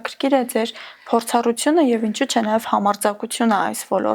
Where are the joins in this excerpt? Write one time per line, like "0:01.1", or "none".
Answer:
none